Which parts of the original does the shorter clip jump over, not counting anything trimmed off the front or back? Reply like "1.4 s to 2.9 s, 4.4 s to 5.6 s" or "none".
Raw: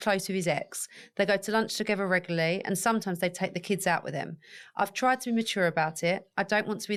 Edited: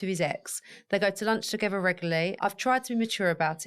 2.6 s to 4.7 s

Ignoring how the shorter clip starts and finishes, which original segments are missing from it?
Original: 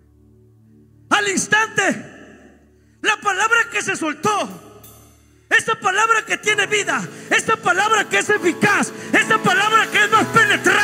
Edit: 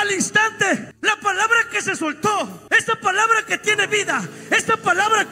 2.1 s to 2.9 s, 4.6 s to 5.4 s

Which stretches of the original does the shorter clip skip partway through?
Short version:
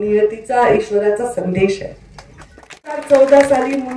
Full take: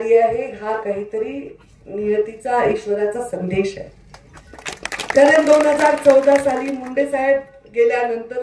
5.0 s to 6.0 s

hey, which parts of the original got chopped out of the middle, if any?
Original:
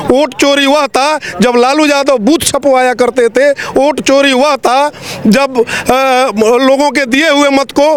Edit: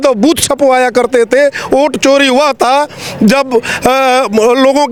none

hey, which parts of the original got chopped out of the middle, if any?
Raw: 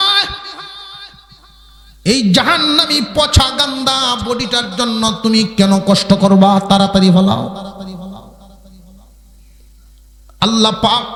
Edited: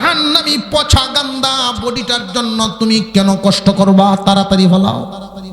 none

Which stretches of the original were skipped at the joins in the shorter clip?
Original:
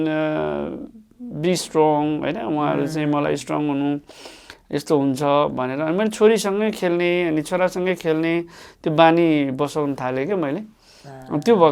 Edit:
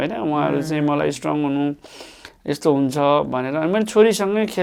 none

